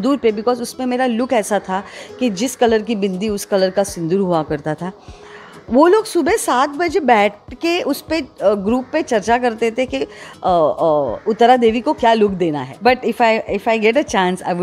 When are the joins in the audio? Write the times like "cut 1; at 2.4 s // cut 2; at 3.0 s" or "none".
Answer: cut 1; at 12.7 s